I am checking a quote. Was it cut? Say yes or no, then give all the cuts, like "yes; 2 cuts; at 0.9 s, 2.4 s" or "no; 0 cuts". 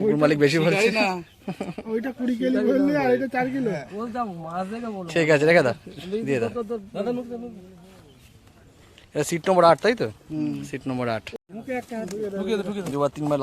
yes; 1 cut; at 11.4 s